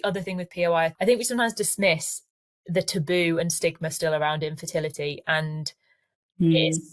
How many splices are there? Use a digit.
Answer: 1